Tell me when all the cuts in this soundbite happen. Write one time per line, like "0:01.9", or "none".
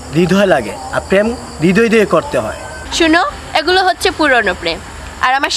none